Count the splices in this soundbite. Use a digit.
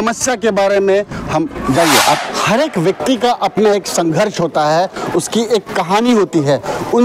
1